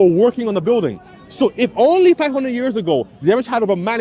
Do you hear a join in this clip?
no; 0 cuts

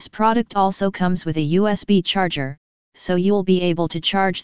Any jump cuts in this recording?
no; 0 cuts

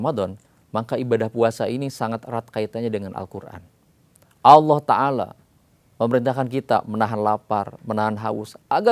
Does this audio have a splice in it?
no; 0 cuts

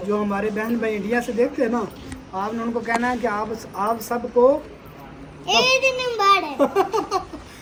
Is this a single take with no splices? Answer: yes; 0 cuts

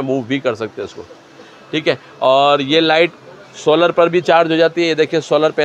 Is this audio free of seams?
yes; 0 cuts

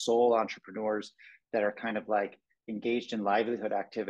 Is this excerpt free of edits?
yes; 0 cuts

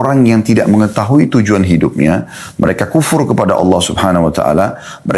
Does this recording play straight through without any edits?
yes; 0 cuts

